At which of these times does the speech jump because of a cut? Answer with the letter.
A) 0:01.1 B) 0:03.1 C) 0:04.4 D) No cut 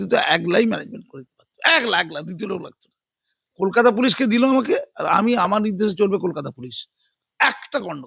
D